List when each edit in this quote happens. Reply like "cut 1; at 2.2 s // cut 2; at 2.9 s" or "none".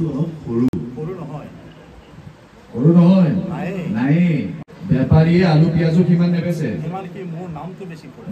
cut 1; at 4.7 s